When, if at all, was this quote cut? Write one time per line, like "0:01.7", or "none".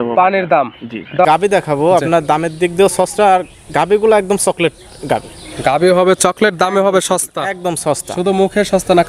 0:01.2

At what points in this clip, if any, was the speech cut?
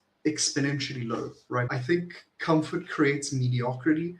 0:01.7

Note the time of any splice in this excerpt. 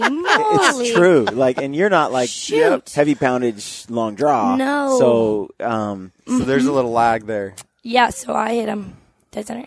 none

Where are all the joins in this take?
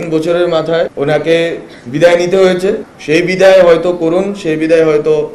0:00.9
0:02.9

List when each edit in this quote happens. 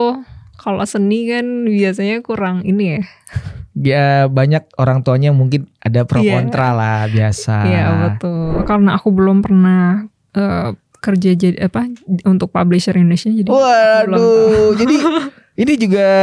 0:08.6

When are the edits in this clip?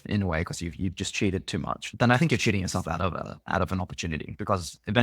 0:01.9

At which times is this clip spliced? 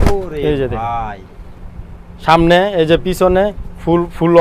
none

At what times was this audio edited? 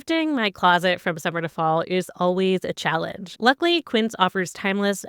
0:03.3

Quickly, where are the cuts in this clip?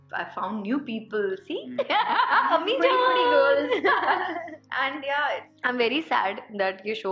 0:05.5

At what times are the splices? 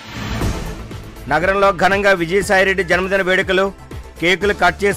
0:01.1

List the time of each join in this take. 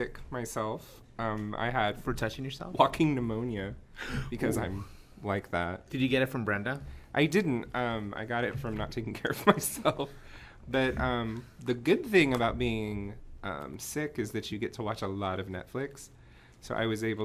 none

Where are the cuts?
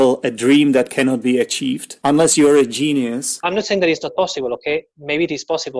0:01.9
0:03.4

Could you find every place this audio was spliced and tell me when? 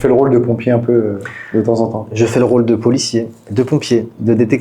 none

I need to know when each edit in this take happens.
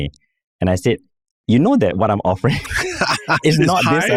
none

